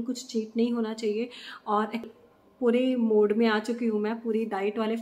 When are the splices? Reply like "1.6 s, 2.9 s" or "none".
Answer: 2.0 s